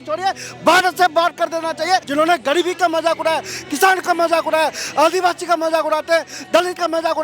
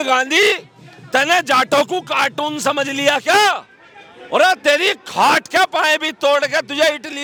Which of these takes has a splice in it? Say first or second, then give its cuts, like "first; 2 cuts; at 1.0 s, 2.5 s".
first; 1 cut; at 2.1 s